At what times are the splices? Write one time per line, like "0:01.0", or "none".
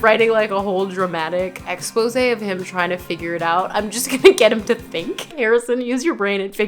0:01.7
0:05.4